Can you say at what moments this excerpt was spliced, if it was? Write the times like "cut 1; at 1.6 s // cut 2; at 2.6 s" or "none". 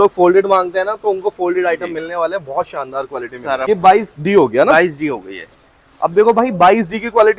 cut 1; at 3.6 s

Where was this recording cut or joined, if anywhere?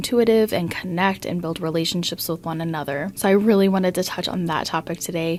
none

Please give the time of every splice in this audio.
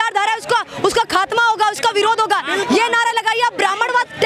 none

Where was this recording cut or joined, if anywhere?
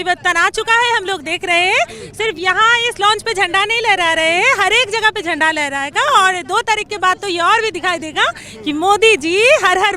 none

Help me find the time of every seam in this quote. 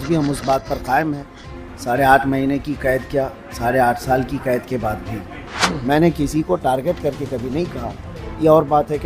cut 1; at 5.8 s

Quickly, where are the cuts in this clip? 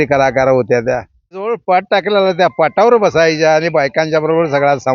cut 1; at 1.6 s

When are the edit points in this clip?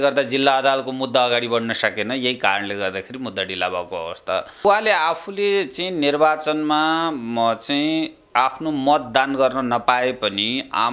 cut 1; at 4.6 s

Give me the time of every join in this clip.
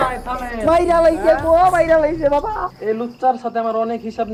none

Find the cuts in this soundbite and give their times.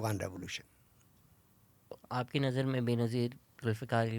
cut 1; at 1.9 s

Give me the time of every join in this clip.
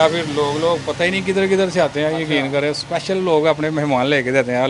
none

